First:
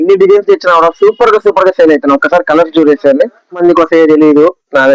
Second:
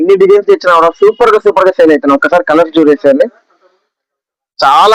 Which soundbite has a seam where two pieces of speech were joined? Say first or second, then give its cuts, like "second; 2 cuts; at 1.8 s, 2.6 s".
first; 1 cut; at 3.6 s